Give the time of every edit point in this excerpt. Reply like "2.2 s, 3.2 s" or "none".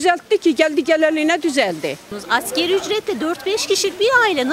2.0 s